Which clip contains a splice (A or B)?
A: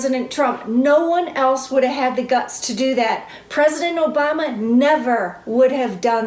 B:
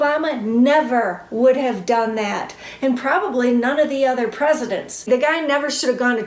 B